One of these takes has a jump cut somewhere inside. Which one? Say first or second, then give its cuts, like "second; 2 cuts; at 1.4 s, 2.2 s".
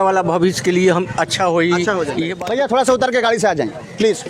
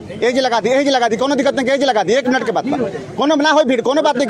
first; 1 cut; at 2.3 s